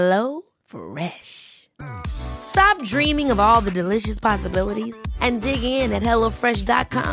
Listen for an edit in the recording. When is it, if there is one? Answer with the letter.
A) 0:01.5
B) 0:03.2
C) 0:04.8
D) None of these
D